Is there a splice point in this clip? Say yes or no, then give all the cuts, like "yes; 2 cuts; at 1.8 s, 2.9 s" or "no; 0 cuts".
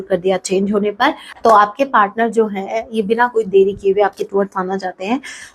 yes; 1 cut; at 1.3 s